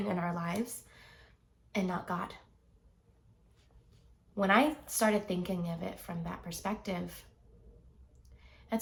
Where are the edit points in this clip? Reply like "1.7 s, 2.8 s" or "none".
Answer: none